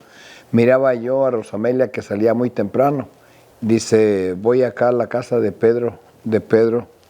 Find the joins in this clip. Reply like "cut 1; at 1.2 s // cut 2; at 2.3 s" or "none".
cut 1; at 3.4 s